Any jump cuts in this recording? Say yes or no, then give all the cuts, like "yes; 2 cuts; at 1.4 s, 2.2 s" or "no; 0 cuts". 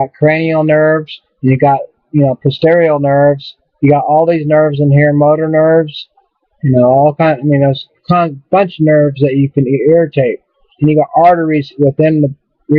yes; 1 cut; at 8.0 s